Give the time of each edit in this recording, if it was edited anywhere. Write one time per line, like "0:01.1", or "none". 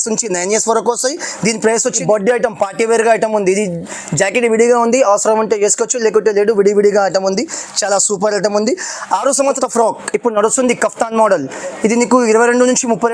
0:02.0
0:09.6